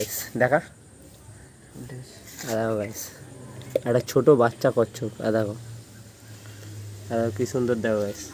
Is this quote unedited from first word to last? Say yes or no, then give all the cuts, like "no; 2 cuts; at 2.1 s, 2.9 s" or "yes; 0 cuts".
yes; 0 cuts